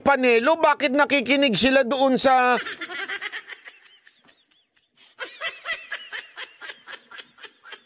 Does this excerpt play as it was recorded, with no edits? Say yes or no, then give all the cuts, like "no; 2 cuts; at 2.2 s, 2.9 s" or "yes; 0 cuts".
yes; 0 cuts